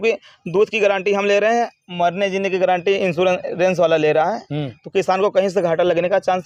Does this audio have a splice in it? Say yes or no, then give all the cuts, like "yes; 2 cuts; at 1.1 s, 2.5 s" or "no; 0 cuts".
no; 0 cuts